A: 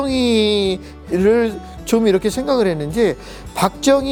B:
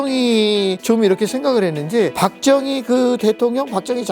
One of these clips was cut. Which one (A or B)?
B